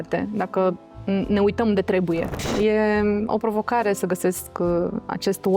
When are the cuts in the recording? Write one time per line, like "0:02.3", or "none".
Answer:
0:02.4